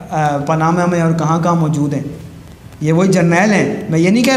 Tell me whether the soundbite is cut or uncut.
uncut